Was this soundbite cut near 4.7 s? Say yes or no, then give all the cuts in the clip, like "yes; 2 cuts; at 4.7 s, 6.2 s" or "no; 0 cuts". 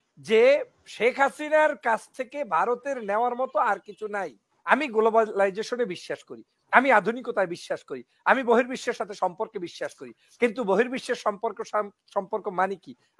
yes; 1 cut; at 4.7 s